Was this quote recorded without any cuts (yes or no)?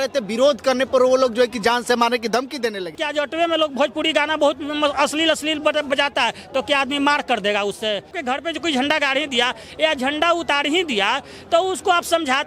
no